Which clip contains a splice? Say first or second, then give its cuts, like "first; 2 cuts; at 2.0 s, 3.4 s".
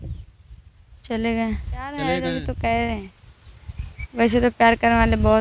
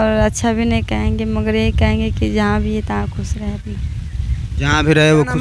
first; 1 cut; at 2.1 s